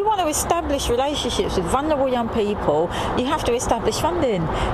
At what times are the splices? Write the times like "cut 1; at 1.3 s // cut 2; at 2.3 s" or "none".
none